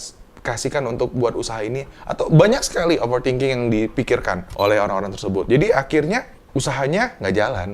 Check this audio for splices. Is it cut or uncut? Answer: cut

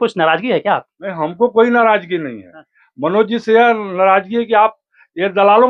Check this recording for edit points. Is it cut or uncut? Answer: uncut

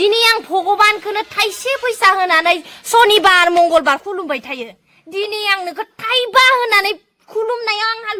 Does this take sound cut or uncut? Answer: uncut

